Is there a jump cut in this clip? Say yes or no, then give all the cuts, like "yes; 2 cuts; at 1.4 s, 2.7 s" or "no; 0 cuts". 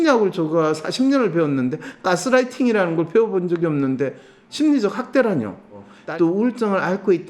yes; 1 cut; at 5.9 s